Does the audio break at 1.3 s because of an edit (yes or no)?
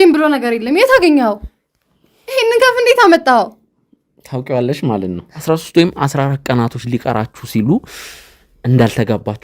no